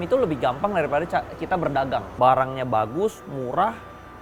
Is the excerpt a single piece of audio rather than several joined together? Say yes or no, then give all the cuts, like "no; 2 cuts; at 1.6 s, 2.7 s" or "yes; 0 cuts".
no; 1 cut; at 2.1 s